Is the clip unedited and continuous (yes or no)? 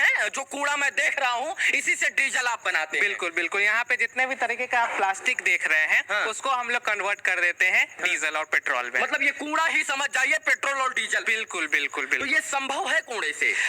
yes